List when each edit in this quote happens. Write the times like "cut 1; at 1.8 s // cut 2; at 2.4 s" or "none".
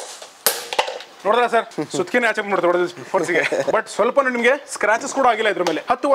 none